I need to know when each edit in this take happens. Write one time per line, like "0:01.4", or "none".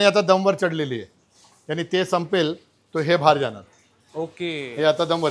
none

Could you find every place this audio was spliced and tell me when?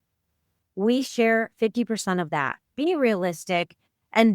0:02.7

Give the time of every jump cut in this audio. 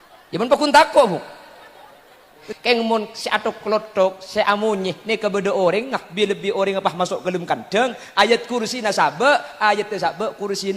0:02.5

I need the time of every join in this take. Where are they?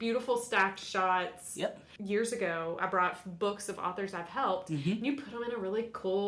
0:01.9

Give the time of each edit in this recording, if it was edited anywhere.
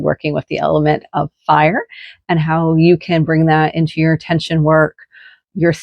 none

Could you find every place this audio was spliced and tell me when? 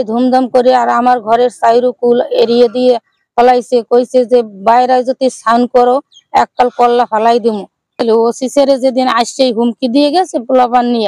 0:07.9

